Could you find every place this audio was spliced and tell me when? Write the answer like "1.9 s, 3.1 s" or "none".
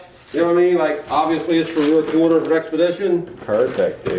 none